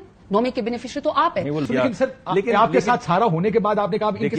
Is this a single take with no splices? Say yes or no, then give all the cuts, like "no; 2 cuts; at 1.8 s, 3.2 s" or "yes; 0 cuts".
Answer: no; 1 cut; at 1.7 s